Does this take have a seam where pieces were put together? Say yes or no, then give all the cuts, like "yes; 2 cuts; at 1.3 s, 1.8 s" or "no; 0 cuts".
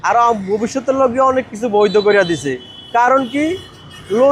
no; 0 cuts